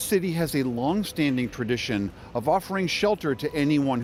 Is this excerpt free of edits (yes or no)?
yes